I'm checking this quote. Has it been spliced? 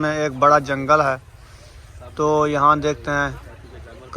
no; 0 cuts

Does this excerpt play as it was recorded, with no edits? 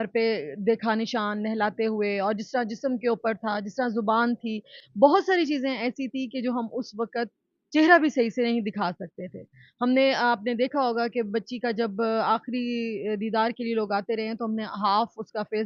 yes; 0 cuts

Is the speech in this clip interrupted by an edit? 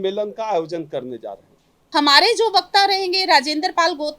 yes; 1 cut; at 1.7 s

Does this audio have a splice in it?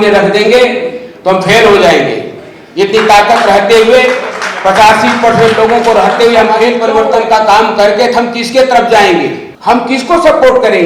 yes; 2 cuts; at 6.7 s, 9.5 s

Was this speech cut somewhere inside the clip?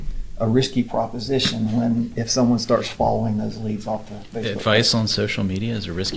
no; 0 cuts

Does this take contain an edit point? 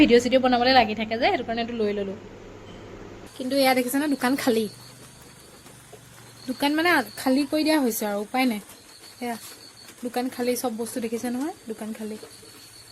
yes; 1 cut; at 3.1 s

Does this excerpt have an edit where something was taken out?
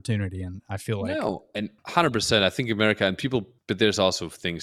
yes; 2 cuts; at 1.8 s, 3.5 s

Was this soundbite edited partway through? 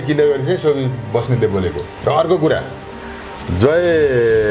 no; 0 cuts

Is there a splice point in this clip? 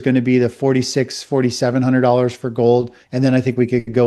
yes; 1 cut; at 3.0 s

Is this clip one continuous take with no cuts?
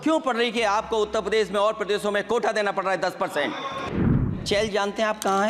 no; 1 cut; at 4.3 s

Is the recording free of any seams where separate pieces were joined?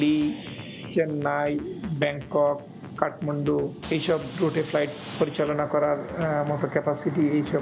yes; 0 cuts

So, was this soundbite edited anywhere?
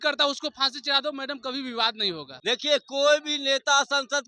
yes; 1 cut; at 2.3 s

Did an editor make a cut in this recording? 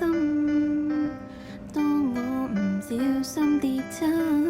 yes; 1 cut; at 0.9 s

